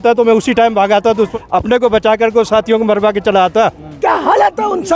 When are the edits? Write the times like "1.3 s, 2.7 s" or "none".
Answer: 1.3 s, 3.9 s